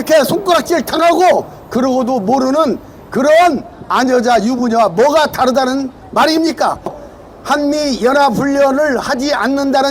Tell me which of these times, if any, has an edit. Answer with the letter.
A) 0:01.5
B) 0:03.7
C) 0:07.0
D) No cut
C